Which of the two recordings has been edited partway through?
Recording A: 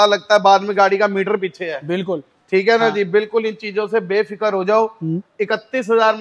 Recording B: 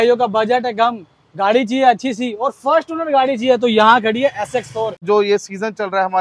B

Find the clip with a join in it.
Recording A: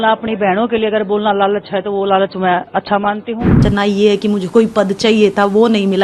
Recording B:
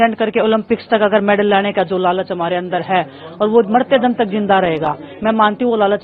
A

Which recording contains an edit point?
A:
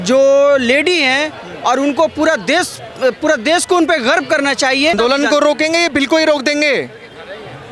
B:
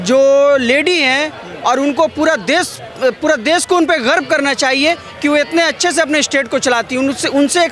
A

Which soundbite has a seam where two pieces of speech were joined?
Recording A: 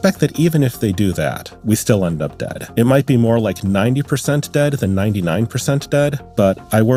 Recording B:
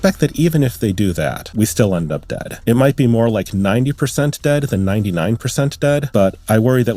B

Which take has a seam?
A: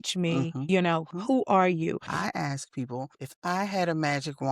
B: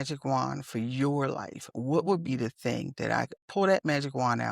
A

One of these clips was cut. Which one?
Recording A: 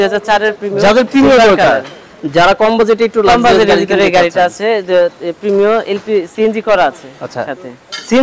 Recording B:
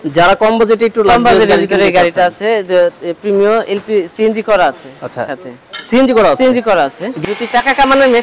B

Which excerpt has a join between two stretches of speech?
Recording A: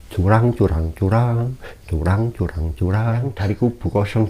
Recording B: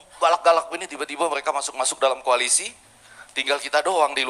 A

